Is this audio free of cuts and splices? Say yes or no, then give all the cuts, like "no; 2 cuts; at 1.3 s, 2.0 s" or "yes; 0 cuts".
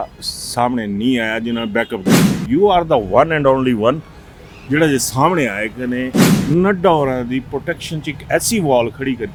yes; 0 cuts